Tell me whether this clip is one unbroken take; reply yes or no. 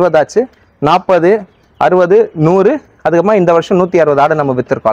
yes